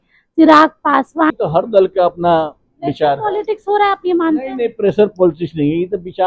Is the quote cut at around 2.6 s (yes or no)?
no